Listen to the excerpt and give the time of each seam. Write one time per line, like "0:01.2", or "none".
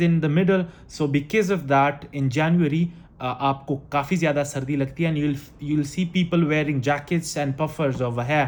none

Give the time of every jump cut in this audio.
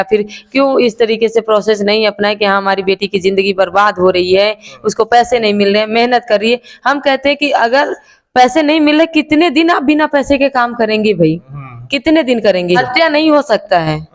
0:12.8

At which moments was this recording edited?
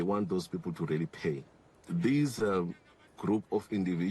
0:01.8

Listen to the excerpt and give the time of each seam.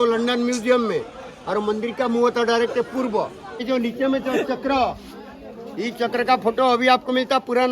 0:03.6

